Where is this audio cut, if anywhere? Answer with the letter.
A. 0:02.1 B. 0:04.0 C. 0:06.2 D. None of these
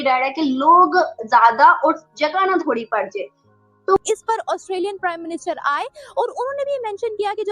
B